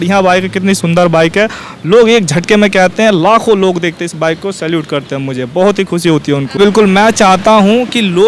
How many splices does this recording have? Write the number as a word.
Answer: one